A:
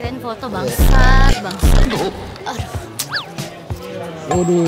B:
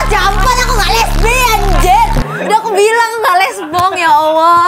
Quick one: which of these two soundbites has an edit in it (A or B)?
A